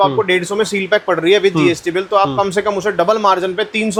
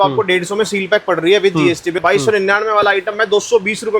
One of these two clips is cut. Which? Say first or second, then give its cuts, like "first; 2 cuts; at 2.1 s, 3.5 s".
second; 1 cut; at 2.0 s